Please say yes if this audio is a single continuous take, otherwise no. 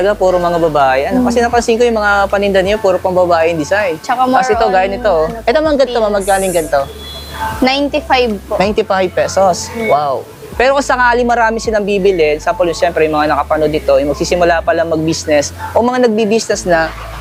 yes